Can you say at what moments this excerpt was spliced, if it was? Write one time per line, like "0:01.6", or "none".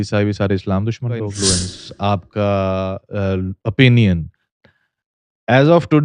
0:01.2